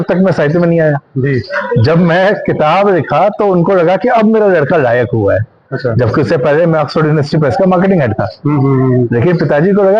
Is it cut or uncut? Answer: uncut